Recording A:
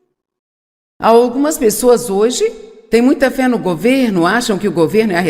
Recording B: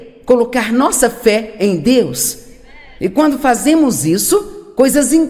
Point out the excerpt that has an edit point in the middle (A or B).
A